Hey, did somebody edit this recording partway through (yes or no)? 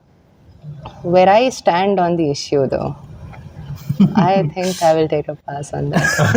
no